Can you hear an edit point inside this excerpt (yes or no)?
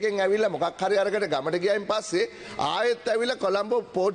no